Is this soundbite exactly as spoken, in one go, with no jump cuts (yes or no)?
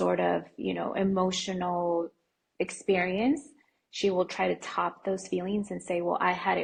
yes